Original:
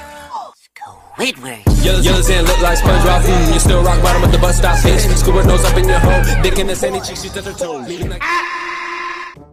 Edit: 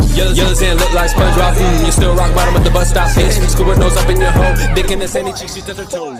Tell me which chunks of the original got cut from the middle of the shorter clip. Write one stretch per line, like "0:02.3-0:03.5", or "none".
none